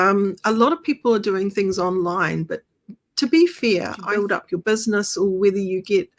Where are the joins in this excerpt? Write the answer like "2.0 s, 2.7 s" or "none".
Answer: 4.0 s